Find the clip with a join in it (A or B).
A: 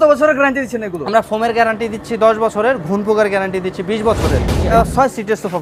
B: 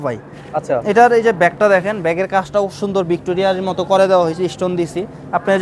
A